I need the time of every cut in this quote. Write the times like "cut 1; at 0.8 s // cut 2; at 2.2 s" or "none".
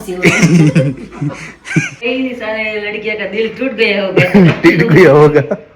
cut 1; at 2.0 s